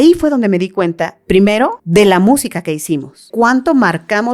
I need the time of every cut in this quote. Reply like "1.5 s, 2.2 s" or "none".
1.8 s, 3.2 s